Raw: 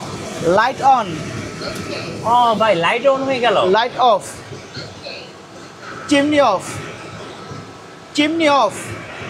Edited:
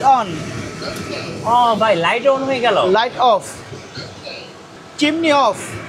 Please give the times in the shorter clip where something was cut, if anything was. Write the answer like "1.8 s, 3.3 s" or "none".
4.8 s